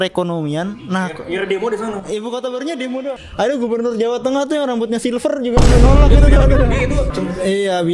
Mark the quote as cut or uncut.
cut